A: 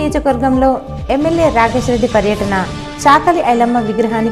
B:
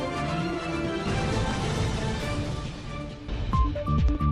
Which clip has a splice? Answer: B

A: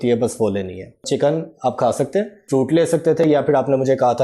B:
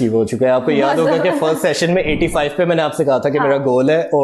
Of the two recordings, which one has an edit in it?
A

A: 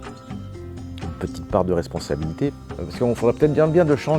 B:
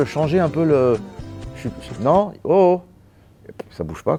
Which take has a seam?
A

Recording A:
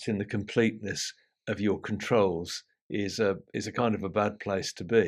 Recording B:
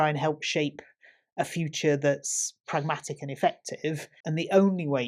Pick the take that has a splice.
B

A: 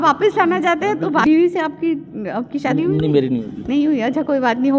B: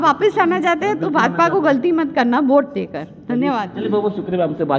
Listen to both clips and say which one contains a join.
A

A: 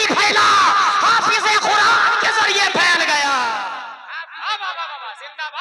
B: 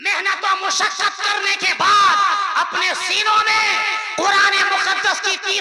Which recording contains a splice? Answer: A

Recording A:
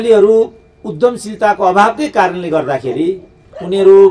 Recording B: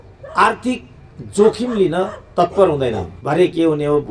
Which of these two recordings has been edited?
B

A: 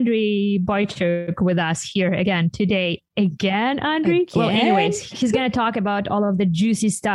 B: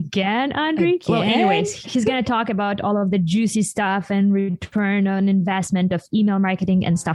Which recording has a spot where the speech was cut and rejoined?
A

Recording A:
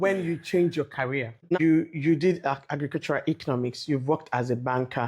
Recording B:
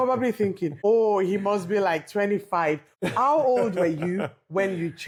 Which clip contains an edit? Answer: A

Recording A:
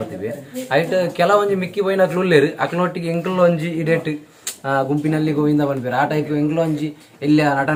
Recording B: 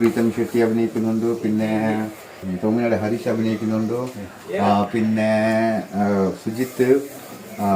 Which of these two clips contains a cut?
B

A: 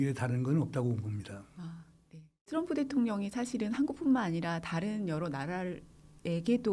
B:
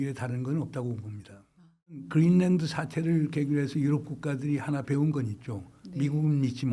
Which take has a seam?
B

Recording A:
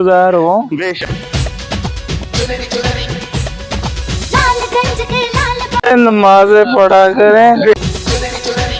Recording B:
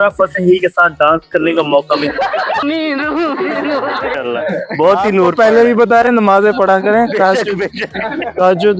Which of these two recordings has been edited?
B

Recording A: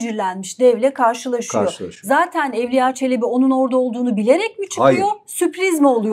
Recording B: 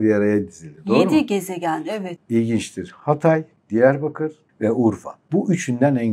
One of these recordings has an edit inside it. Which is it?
B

